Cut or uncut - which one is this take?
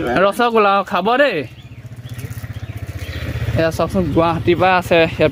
uncut